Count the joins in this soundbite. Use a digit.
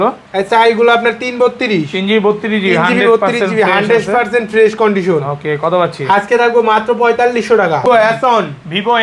1